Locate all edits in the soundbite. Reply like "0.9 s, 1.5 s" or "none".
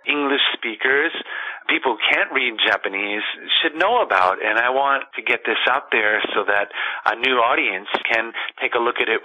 5.1 s, 8.0 s